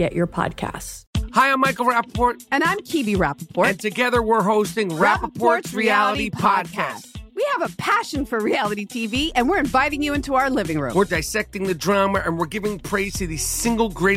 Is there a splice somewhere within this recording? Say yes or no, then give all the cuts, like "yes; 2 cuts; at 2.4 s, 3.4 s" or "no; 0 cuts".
yes; 1 cut; at 0.9 s